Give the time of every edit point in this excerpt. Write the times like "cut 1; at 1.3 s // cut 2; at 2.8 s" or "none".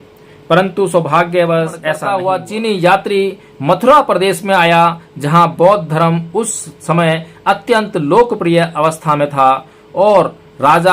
cut 1; at 2.0 s

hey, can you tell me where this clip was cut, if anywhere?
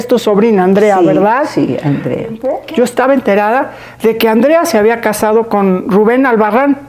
cut 1; at 2.5 s

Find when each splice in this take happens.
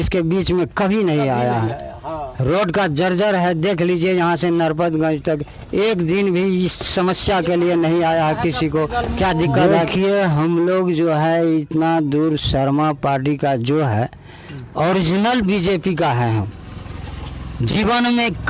cut 1; at 9.9 s

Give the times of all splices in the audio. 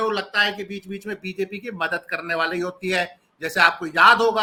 none

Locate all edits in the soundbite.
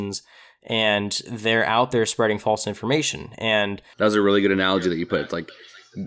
cut 1; at 3.8 s

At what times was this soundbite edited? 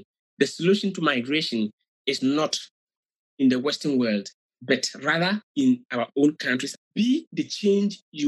cut 1; at 6.7 s

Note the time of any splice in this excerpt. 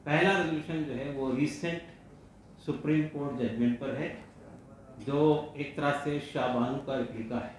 none

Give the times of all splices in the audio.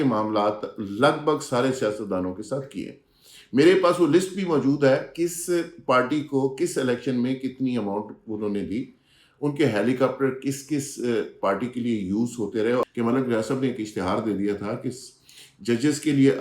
cut 1; at 12.8 s

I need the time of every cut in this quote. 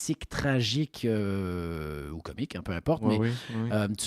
none

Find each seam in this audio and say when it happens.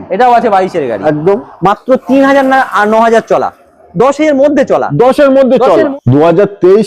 cut 1; at 1.5 s // cut 2; at 5.9 s

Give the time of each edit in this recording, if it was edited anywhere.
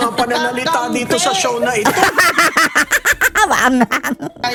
none

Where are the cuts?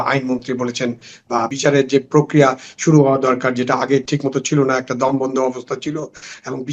cut 1; at 1.3 s

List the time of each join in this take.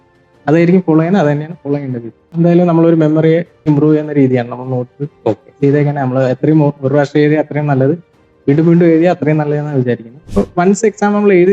cut 1; at 2.3 s // cut 2; at 3.7 s // cut 3; at 10.1 s

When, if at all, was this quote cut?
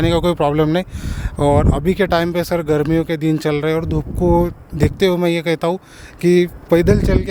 none

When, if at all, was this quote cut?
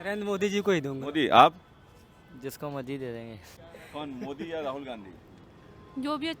cut 1; at 3.6 s

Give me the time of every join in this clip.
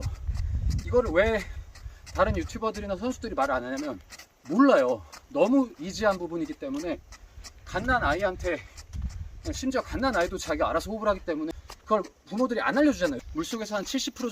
cut 1; at 11.7 s // cut 2; at 13.2 s

